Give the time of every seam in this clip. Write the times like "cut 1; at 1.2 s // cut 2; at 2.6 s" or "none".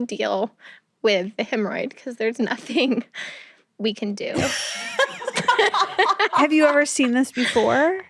cut 1; at 4.4 s